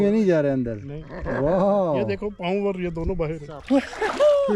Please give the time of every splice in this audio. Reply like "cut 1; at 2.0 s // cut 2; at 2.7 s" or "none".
cut 1; at 3.5 s